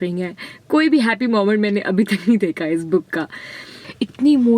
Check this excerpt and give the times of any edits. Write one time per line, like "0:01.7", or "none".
0:03.6